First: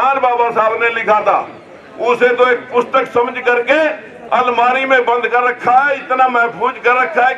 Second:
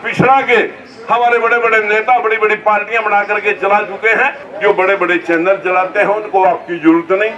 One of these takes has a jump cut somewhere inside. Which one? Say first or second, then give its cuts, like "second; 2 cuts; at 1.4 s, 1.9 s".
second; 1 cut; at 4.4 s